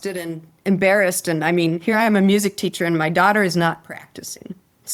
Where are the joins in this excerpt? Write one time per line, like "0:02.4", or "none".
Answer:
none